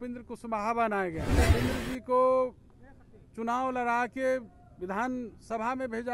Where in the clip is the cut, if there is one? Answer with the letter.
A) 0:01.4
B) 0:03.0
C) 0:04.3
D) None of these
A